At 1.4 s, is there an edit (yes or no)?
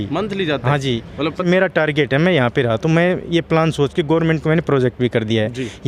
yes